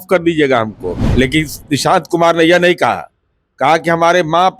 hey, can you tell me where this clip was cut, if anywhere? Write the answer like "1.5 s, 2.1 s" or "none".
0.9 s